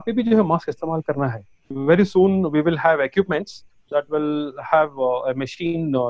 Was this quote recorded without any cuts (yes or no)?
no